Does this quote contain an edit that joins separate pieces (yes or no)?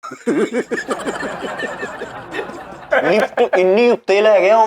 yes